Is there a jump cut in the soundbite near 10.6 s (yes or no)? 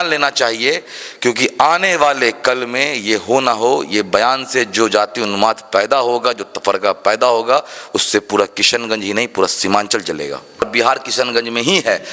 yes